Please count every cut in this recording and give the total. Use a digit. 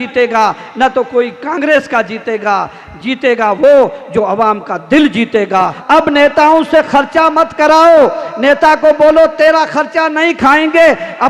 1